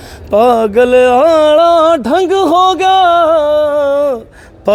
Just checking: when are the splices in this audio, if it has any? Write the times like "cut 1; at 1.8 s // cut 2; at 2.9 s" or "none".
none